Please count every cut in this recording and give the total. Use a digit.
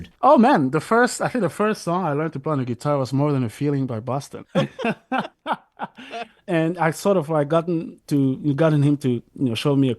1